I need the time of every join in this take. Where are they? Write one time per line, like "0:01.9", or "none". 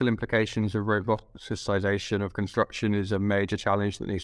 none